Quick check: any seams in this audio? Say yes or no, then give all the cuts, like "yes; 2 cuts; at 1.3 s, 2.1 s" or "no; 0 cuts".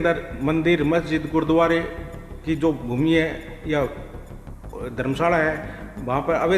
no; 0 cuts